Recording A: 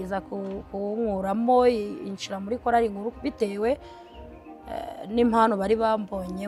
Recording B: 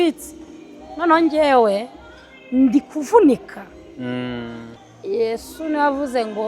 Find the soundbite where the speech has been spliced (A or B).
B